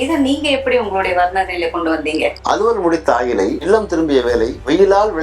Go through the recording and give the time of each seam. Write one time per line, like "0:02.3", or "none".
0:02.4

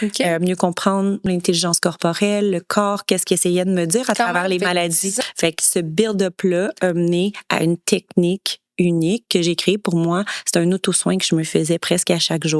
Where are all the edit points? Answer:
0:01.3
0:05.2

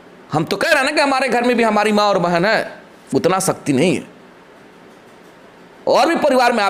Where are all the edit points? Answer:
none

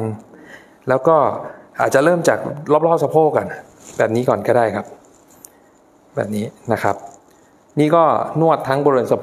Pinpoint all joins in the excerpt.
none

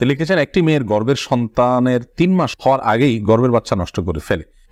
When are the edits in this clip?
none

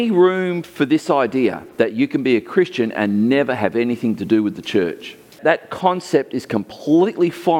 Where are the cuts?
0:05.4

